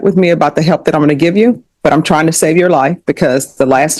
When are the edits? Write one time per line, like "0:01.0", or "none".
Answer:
none